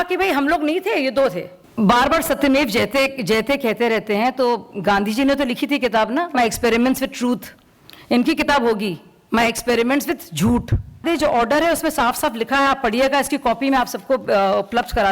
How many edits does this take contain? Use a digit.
2